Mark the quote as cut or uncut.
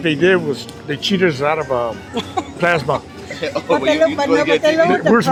uncut